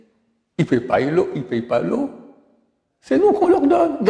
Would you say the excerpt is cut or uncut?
uncut